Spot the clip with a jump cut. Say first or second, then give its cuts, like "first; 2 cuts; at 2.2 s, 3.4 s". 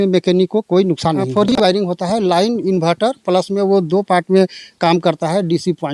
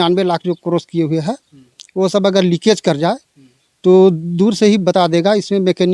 first; 1 cut; at 1.6 s